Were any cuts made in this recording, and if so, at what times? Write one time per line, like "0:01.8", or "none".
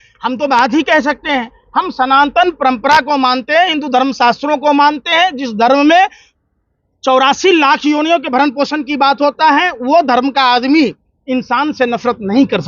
none